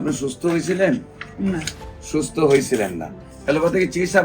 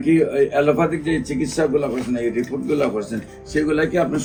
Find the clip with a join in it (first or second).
first